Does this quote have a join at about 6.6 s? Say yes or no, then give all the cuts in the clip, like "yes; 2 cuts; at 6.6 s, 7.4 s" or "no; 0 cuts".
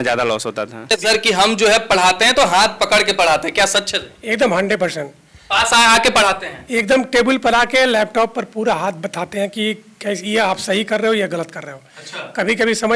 no; 1 cut; at 0.9 s